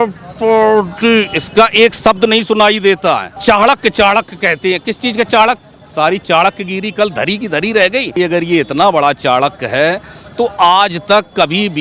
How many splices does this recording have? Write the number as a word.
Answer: two